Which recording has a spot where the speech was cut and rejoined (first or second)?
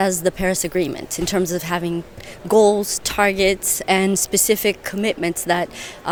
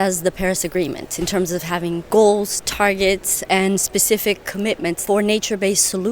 second